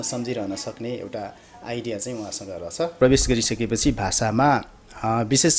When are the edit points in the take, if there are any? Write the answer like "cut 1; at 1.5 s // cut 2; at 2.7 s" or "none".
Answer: cut 1; at 2.9 s